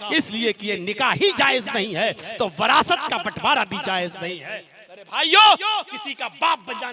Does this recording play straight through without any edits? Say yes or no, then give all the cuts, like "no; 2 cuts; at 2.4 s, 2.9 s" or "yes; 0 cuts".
yes; 0 cuts